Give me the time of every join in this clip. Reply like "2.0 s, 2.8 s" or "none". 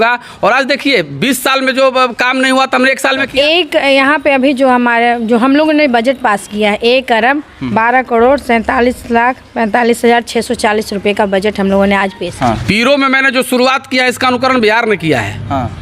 3.2 s, 12.3 s